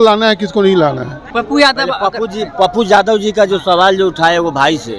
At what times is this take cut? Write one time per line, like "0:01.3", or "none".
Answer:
0:01.2